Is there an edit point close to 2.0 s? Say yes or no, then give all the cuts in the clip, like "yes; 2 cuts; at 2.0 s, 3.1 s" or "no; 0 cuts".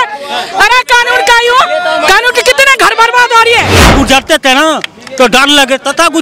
no; 1 cut; at 3.9 s